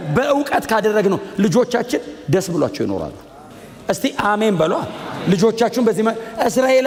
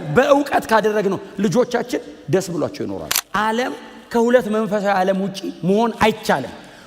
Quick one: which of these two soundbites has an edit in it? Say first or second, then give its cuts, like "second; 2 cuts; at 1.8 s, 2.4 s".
second; 1 cut; at 3.1 s